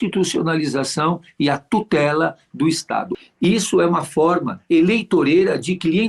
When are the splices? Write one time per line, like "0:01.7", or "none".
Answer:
0:03.1